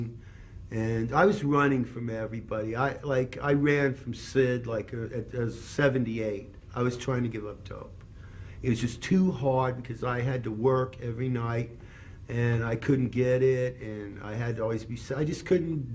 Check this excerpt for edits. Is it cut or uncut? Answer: uncut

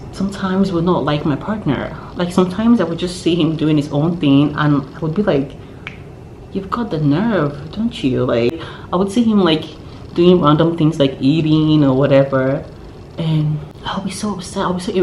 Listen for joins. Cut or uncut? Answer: cut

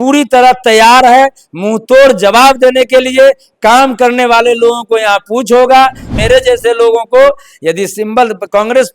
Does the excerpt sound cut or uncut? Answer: cut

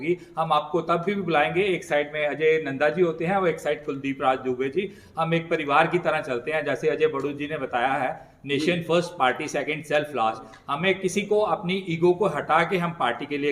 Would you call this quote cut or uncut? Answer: uncut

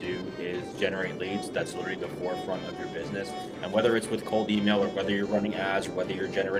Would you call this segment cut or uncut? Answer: uncut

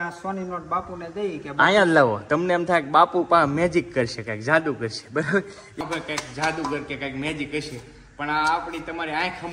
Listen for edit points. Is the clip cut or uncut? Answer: cut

